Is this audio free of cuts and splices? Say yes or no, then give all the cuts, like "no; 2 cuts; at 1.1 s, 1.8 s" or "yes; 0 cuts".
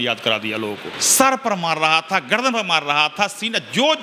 no; 1 cut; at 0.9 s